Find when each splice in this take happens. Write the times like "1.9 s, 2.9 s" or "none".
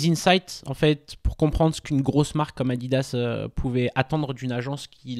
none

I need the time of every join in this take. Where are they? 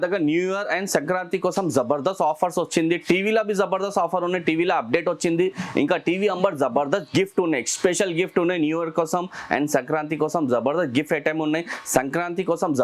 none

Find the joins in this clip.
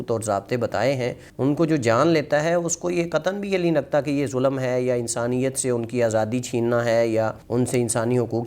1.2 s, 7.4 s

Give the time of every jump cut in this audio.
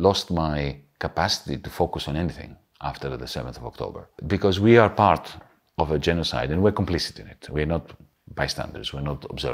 4.1 s

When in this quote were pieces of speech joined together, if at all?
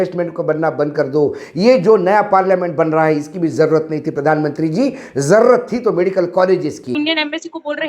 6.9 s

